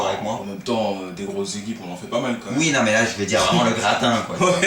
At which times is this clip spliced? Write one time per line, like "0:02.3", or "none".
0:01.3